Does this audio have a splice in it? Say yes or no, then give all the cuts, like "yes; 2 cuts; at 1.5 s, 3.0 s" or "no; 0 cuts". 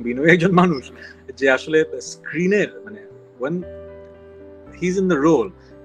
no; 0 cuts